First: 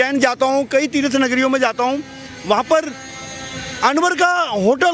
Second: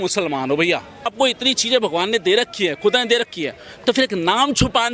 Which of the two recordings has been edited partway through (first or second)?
second